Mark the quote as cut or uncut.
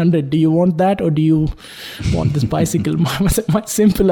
uncut